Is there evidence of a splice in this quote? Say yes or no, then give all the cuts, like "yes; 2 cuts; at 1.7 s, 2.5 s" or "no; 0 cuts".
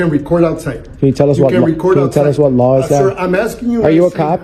no; 0 cuts